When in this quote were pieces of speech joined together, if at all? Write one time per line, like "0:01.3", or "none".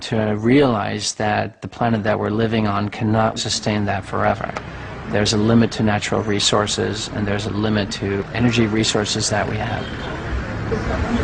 none